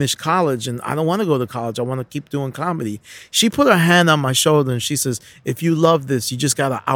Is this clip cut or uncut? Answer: uncut